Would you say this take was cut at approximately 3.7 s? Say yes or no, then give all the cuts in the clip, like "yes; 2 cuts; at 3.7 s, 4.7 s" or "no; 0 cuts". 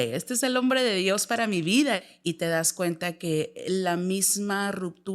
no; 1 cut; at 2.0 s